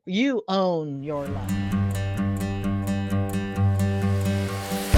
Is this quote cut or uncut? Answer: cut